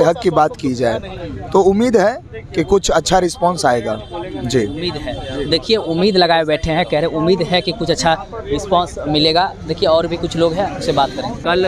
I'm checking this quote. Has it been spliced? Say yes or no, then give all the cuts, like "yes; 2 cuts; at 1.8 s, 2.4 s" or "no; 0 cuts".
no; 0 cuts